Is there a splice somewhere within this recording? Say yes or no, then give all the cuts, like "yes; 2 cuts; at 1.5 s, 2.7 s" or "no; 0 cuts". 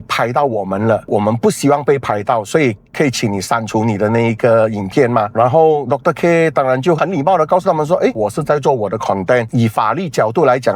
no; 0 cuts